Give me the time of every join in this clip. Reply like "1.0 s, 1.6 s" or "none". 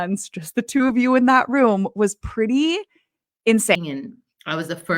3.8 s